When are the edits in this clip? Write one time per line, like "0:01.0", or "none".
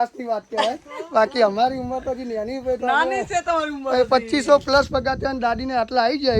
none